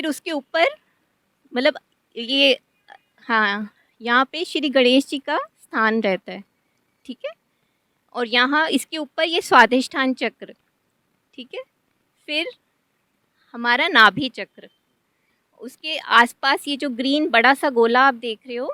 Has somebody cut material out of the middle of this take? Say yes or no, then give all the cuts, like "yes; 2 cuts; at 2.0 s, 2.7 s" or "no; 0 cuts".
no; 0 cuts